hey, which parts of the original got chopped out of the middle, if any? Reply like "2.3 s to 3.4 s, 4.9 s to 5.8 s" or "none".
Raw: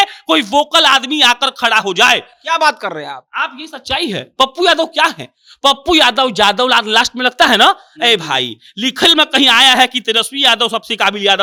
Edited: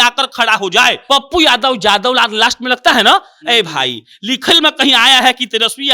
2.2 s to 5.5 s